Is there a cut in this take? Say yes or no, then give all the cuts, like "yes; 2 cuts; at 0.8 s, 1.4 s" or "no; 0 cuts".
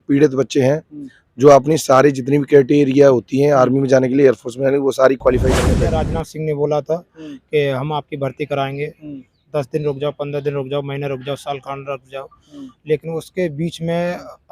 yes; 1 cut; at 5.7 s